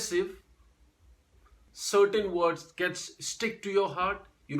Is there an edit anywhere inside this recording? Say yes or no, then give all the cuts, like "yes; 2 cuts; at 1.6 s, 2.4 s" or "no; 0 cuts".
yes; 1 cut; at 1.7 s